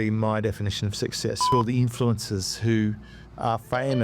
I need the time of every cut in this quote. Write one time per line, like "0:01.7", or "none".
0:01.5